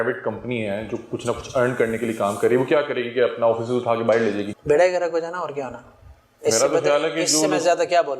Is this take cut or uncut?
cut